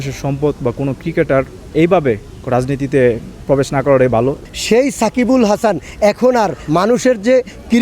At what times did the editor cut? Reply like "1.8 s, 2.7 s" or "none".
1.7 s, 3.3 s, 4.4 s